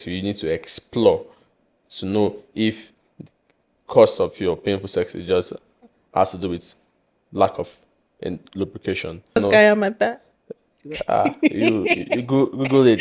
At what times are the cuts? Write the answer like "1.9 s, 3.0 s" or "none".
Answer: 9.4 s

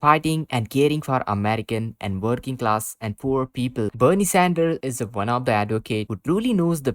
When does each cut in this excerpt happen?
3.9 s

